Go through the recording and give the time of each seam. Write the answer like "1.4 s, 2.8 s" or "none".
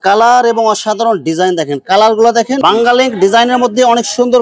2.6 s